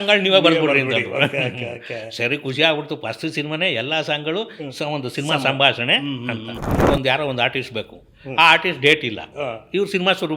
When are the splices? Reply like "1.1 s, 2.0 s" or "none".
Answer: 6.5 s